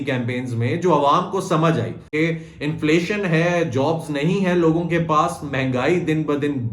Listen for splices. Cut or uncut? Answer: cut